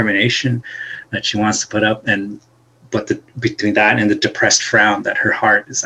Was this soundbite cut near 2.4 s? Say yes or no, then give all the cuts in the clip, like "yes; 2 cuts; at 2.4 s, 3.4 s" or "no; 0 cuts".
no; 0 cuts